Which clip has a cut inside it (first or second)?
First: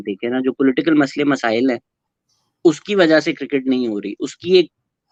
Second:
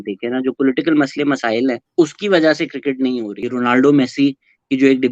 second